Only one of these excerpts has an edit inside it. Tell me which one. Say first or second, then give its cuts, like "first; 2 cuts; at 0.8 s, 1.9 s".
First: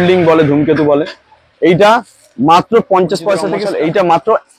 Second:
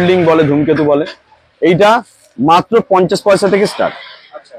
first; 1 cut; at 3.6 s